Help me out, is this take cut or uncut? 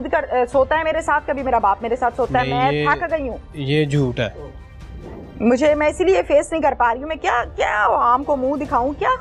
uncut